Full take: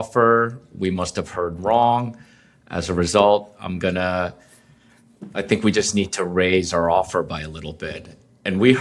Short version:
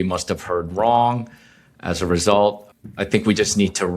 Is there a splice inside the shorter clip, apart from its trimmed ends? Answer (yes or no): yes